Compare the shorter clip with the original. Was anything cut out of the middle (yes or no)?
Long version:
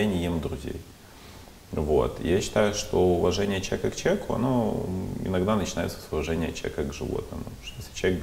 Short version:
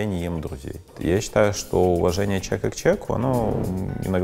yes